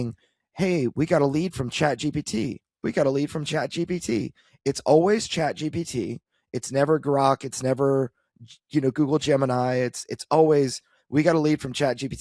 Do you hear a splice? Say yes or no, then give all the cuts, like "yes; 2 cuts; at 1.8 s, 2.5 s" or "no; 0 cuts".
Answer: no; 0 cuts